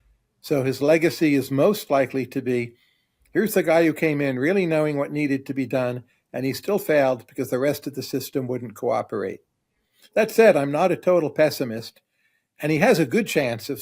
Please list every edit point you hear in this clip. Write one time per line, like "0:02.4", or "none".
none